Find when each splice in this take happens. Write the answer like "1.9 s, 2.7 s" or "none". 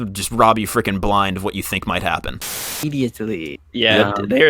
2.7 s